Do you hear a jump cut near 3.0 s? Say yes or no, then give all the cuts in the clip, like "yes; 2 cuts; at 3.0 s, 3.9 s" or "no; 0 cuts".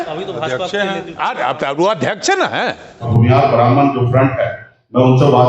yes; 1 cut; at 3.0 s